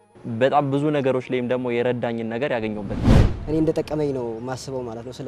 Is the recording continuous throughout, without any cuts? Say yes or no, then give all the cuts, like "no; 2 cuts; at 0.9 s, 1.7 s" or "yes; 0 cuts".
no; 1 cut; at 3.2 s